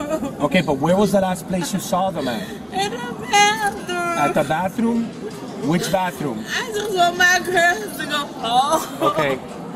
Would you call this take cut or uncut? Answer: uncut